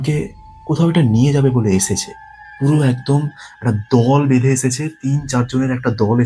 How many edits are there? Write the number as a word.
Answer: zero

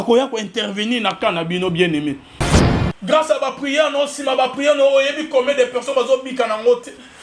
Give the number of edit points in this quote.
one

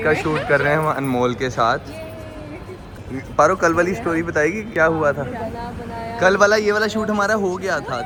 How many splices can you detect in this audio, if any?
zero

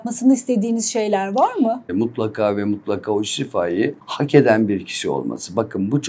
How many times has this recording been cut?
two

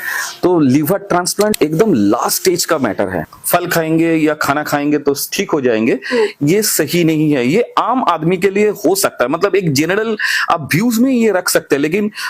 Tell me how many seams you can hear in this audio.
two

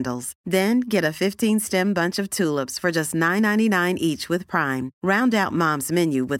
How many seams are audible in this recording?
zero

